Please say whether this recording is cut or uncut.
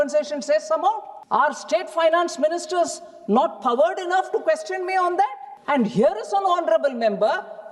cut